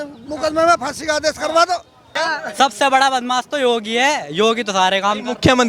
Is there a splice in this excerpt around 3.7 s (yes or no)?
no